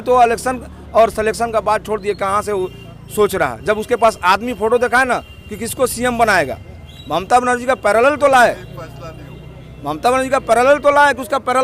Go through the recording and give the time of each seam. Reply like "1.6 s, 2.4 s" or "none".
none